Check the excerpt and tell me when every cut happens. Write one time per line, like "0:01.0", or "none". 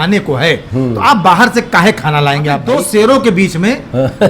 0:02.6